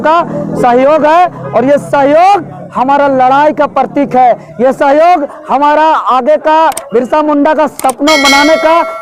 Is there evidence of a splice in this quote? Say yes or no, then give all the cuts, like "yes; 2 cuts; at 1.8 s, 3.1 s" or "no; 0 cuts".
no; 0 cuts